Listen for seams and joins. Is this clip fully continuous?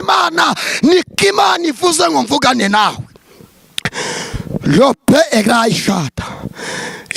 yes; 0 cuts

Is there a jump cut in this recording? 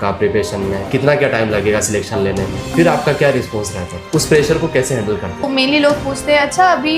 yes; 1 cut; at 5.5 s

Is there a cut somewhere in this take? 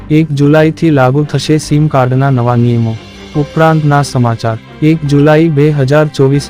yes; 2 cuts; at 3.1 s, 4.6 s

